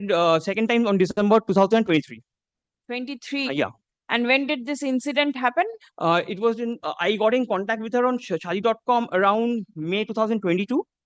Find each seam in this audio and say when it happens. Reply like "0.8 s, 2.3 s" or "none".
none